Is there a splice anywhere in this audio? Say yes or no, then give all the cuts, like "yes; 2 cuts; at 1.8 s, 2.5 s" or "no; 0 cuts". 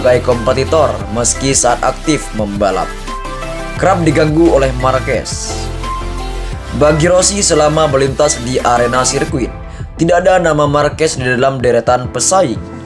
yes; 2 cuts; at 5.3 s, 6.6 s